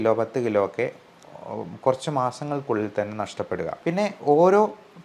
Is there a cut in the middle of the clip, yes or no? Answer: yes